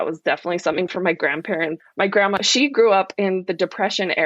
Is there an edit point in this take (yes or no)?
yes